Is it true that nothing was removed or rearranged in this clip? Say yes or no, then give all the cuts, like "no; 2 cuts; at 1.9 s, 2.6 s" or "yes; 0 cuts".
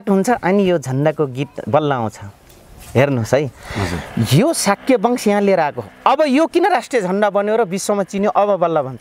yes; 0 cuts